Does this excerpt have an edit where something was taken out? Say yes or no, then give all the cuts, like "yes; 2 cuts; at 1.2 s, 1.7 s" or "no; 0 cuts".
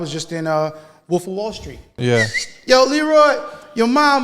yes; 1 cut; at 1.9 s